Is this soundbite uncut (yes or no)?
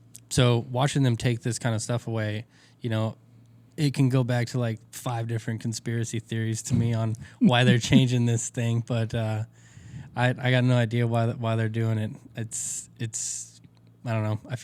yes